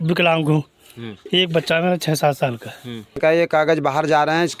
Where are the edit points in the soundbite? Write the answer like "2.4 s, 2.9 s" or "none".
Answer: 3.2 s